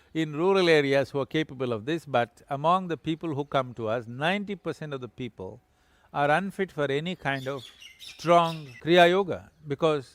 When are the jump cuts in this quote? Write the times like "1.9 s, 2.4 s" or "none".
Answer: 8.7 s